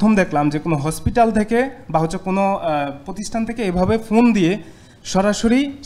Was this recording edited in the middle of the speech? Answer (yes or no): no